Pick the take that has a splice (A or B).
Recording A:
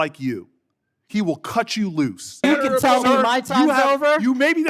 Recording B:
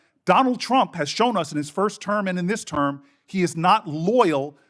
A